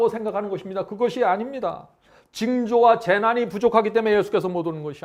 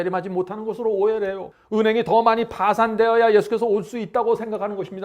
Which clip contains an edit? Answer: second; 1 cut; at 1.5 s

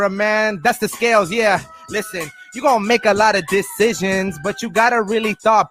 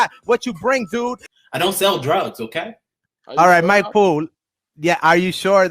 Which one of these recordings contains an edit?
second; 1 cut; at 1.3 s

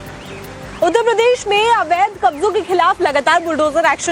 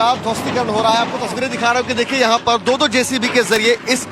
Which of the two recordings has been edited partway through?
second; 1 cut; at 0.9 s

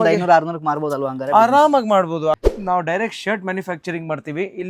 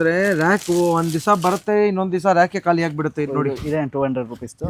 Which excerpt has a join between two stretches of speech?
first; 1 cut; at 2.3 s

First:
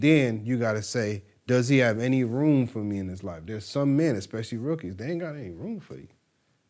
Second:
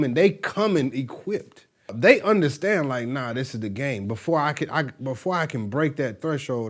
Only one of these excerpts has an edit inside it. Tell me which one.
second; 1 cut; at 1.9 s

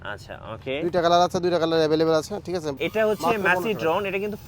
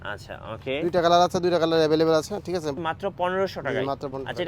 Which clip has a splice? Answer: first; 1 cut; at 2.8 s

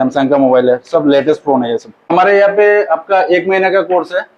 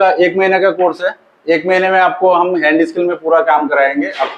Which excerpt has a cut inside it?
first; 1 cut; at 2.1 s

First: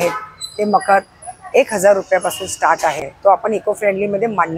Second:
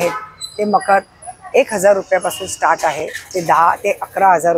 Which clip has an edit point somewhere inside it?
first; 1 cut; at 3.1 s

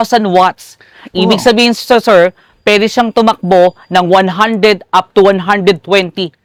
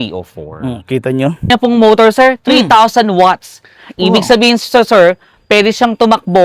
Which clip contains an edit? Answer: second; 1 cut; at 1.5 s

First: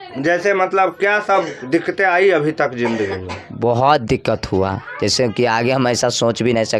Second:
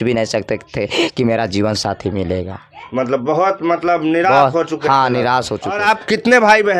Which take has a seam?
second; 1 cut; at 5.8 s

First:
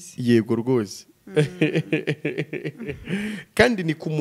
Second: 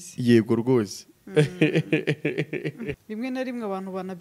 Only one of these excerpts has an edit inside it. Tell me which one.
second; 1 cut; at 3.0 s

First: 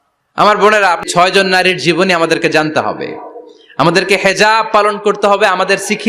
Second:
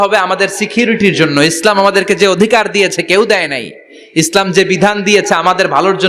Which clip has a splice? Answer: first; 1 cut; at 1.0 s

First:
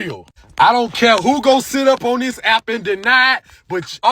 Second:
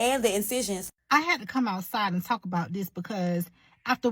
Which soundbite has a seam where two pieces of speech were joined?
second; 1 cut; at 1.1 s

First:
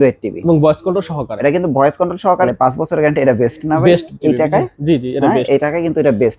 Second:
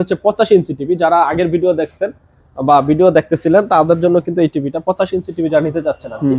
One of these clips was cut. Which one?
first; 1 cut; at 2.5 s

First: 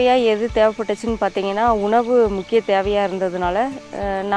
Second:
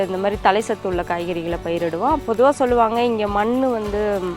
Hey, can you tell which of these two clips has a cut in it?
second; 1 cut; at 2.2 s

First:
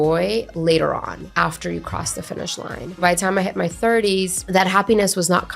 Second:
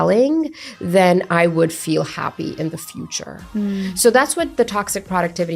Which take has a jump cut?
first; 3 cuts; at 1.3 s, 3.0 s, 4.4 s

